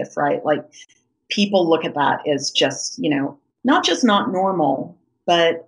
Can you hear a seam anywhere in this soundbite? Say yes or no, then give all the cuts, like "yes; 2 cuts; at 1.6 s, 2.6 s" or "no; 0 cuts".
yes; 1 cut; at 3.5 s